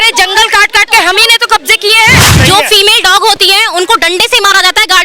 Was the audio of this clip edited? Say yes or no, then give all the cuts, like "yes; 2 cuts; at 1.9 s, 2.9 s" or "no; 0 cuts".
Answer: yes; 1 cut; at 2.3 s